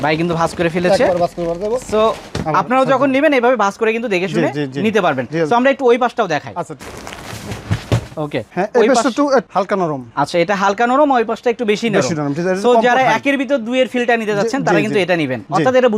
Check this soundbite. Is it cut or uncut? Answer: uncut